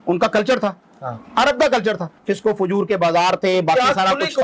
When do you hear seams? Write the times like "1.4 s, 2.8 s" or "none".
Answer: 2.2 s